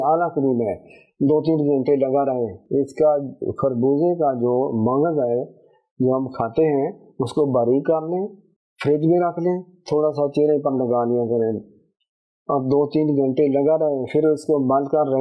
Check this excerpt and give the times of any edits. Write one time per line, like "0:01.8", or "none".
none